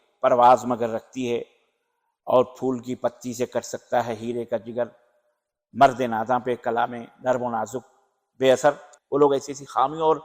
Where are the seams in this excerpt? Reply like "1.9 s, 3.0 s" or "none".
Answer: 8.9 s

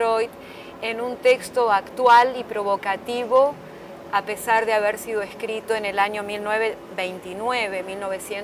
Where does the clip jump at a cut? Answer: none

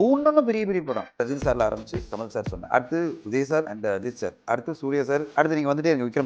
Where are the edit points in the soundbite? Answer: 1.2 s, 2.6 s, 3.7 s, 5.3 s

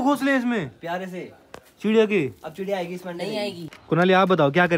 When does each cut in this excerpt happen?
3.7 s

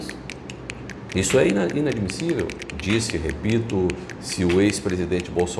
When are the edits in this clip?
2.7 s

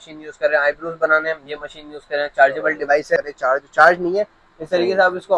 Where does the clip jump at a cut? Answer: 3.2 s

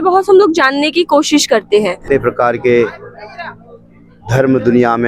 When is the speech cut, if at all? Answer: 2.0 s

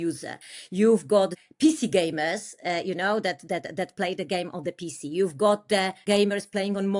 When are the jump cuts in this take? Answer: 1.3 s, 6.0 s

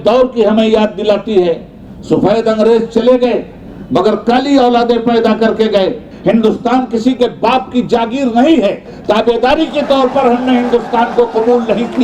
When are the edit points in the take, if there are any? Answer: 6.1 s

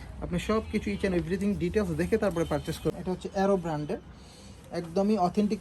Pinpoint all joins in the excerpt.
3.0 s

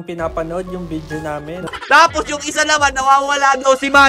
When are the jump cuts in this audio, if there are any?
1.7 s

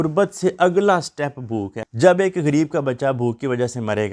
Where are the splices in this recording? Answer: 1.8 s

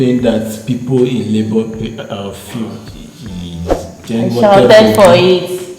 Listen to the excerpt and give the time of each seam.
2.8 s

